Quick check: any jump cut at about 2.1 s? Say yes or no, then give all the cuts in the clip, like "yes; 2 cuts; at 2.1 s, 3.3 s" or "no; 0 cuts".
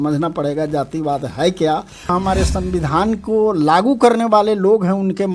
yes; 1 cut; at 2.1 s